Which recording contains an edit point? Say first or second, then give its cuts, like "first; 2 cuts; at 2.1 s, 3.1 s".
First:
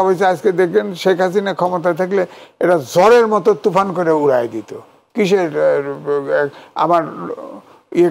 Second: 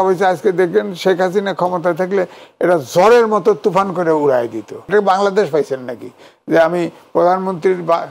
second; 1 cut; at 4.8 s